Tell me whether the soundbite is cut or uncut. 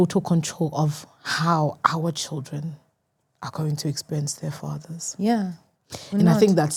uncut